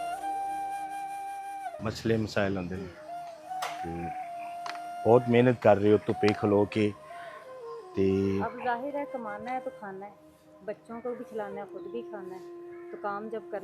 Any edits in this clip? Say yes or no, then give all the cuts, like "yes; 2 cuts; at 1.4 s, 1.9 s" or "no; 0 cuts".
no; 0 cuts